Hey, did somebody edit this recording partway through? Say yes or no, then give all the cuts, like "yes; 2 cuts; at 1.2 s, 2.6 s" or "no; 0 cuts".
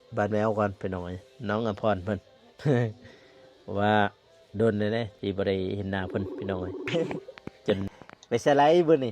yes; 1 cut; at 7.9 s